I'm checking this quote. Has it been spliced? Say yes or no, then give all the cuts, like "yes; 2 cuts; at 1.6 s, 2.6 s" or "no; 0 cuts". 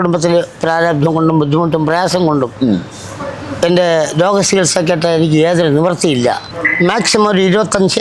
yes; 1 cut; at 6.4 s